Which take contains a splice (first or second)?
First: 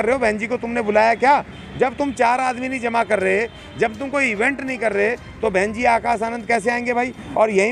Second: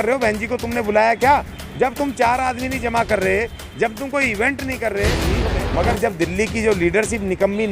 second